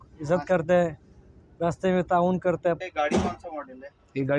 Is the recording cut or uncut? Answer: cut